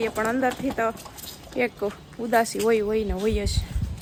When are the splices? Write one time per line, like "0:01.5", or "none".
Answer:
none